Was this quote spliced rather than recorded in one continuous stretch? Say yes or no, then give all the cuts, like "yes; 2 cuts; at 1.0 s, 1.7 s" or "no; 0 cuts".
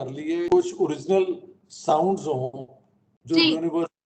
no; 0 cuts